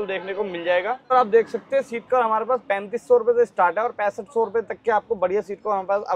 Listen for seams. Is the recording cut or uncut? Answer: cut